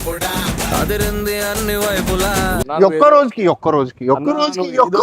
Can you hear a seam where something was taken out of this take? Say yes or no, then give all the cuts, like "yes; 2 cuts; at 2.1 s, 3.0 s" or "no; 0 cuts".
yes; 1 cut; at 2.6 s